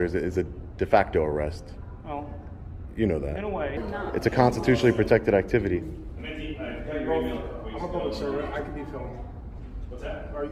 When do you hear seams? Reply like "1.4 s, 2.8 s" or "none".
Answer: 3.8 s